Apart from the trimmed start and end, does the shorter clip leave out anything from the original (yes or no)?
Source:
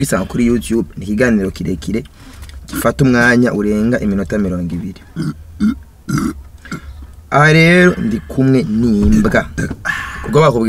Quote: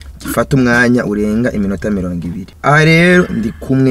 yes